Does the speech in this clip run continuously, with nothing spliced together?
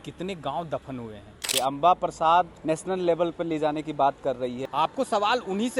no; 3 cuts; at 1.5 s, 2.6 s, 4.6 s

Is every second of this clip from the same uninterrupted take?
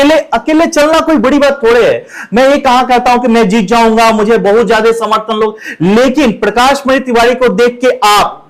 yes; 0 cuts

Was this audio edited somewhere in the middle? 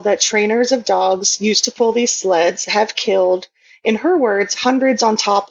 no; 0 cuts

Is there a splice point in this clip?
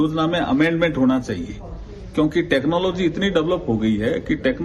no; 0 cuts

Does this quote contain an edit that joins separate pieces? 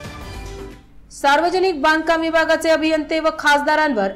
no; 0 cuts

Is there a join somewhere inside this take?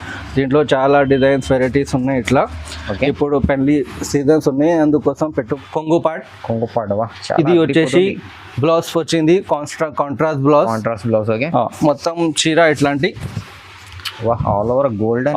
yes; 1 cut; at 5.5 s

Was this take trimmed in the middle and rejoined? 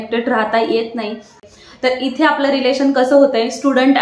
yes; 1 cut; at 1.4 s

